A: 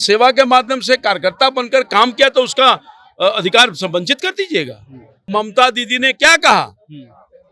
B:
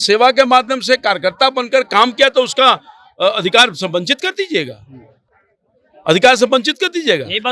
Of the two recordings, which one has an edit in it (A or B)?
A